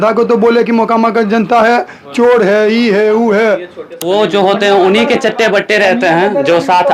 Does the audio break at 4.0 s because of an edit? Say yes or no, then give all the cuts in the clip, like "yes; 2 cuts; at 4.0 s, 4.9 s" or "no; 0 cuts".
yes; 1 cut; at 4.0 s